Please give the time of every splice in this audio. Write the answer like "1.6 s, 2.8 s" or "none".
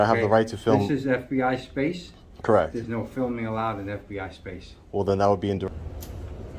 5.7 s